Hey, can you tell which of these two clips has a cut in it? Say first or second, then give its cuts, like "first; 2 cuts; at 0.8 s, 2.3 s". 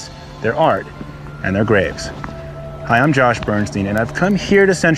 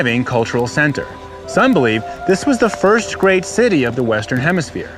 second; 1 cut; at 2.7 s